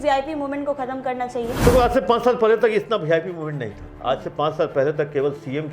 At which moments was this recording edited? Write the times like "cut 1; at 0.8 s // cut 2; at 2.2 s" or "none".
cut 1; at 1.6 s